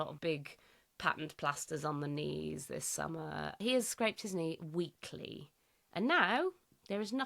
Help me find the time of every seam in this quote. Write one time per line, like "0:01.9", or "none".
0:03.5